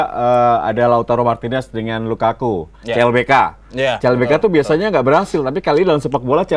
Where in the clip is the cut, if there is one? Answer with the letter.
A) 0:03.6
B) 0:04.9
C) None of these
C